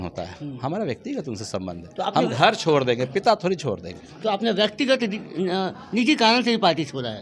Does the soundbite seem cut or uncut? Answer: uncut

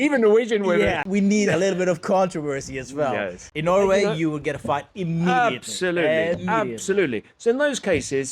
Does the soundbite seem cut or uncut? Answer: cut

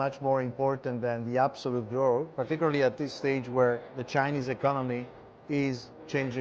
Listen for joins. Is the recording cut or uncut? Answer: cut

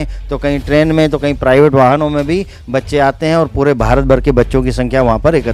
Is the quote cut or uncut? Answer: uncut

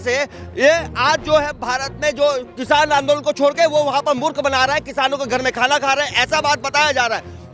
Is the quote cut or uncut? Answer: uncut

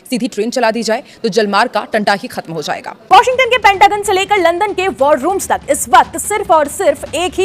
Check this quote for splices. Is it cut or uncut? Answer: cut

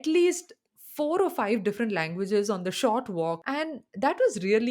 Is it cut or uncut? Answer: cut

